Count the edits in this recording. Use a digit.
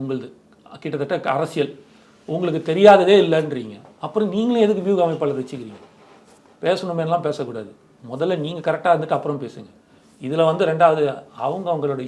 0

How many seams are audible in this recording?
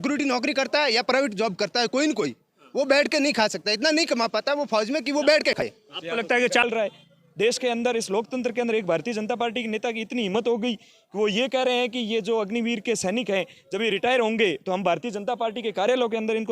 1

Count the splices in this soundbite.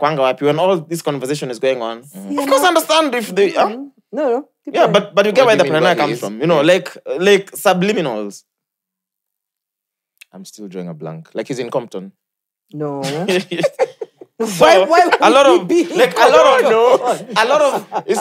0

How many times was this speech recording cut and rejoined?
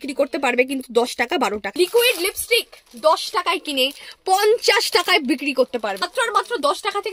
2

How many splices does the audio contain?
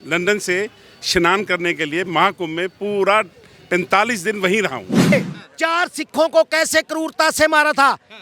1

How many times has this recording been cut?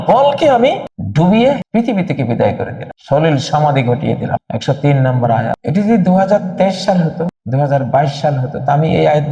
0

